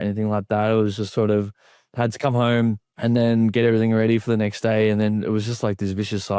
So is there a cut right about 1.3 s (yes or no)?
no